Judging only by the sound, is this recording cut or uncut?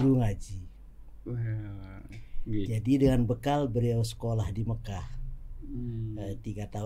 uncut